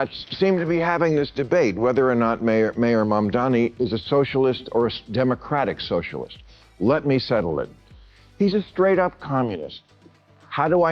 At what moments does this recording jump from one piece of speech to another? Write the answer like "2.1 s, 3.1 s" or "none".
none